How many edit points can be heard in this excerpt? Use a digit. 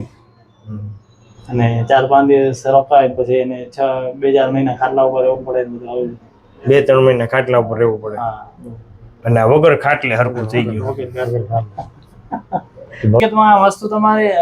1